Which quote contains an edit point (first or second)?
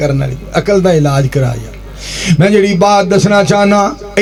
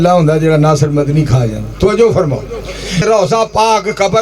second